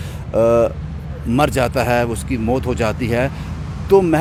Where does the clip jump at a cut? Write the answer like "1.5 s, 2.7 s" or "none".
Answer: none